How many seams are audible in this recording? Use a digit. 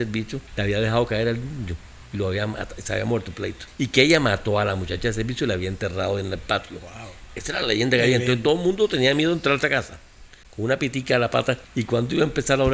1